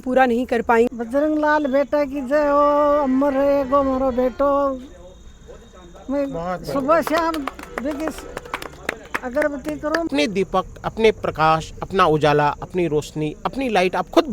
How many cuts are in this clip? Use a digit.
2